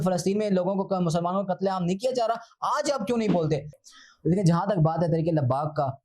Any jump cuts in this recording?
yes; 1 cut; at 3.8 s

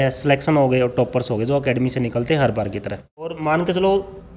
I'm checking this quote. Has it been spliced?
yes; 1 cut; at 3.4 s

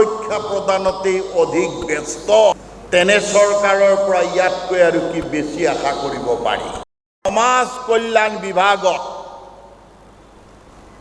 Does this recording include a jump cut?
yes; 2 cuts; at 2.5 s, 7.3 s

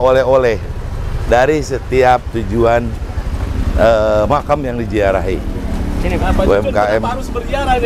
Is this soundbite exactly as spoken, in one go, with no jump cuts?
yes; 0 cuts

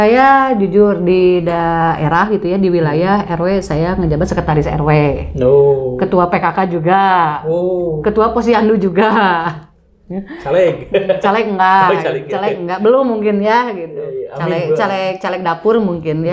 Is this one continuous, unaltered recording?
yes; 0 cuts

